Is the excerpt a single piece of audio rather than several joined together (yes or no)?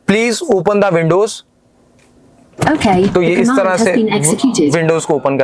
yes